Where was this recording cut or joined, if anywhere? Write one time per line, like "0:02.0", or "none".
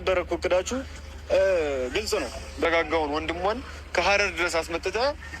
0:02.7